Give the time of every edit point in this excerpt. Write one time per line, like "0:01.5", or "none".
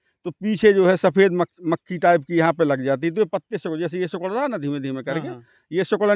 none